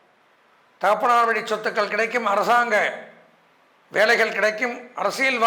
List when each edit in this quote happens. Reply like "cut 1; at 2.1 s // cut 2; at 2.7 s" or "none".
none